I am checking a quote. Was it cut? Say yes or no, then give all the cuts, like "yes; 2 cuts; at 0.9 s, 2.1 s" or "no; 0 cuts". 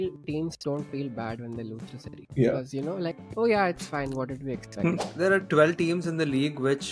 yes; 1 cut; at 5.1 s